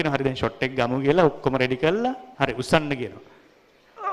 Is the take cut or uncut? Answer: cut